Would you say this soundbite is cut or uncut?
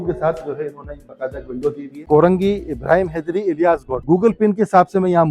cut